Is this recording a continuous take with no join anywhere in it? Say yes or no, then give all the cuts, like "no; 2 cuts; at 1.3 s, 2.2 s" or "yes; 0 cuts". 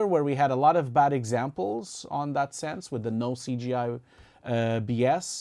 yes; 0 cuts